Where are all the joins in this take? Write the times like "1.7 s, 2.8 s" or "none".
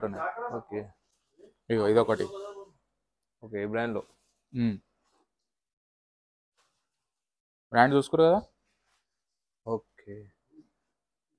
none